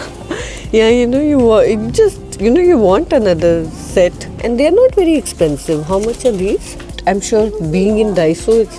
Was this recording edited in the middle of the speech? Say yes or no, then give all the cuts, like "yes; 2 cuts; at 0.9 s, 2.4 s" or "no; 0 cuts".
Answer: yes; 2 cuts; at 4.4 s, 6.9 s